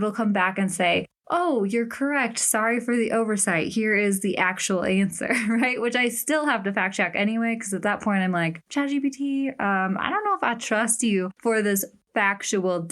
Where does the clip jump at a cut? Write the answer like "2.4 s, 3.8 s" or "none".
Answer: none